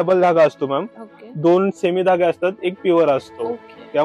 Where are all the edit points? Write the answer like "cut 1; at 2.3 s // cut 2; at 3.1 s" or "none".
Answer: none